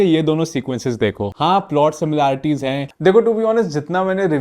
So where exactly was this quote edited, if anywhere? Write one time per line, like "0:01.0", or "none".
0:02.8